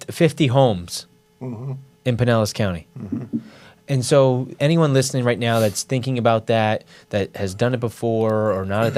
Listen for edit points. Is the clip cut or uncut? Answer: uncut